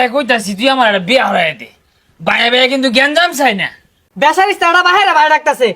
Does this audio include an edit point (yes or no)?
yes